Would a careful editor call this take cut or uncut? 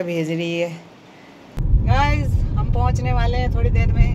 cut